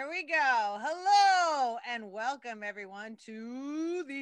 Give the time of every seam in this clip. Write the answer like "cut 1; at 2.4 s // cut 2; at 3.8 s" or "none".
none

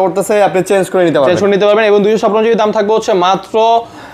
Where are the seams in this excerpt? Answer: none

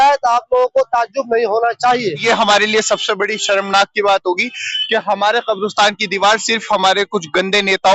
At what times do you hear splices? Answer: cut 1; at 2.2 s

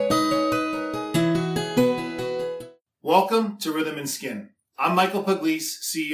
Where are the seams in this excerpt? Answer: cut 1; at 2.6 s

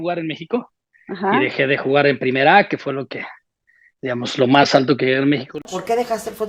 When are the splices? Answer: cut 1; at 5.6 s

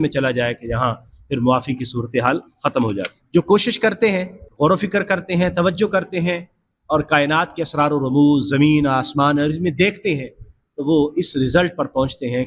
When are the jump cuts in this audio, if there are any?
cut 1; at 3.2 s

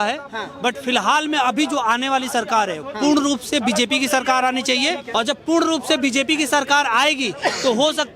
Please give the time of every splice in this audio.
cut 1; at 5.0 s

